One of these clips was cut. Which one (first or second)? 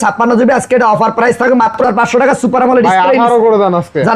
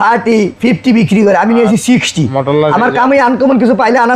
first